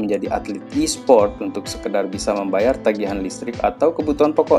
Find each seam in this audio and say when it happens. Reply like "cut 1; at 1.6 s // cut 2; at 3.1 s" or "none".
none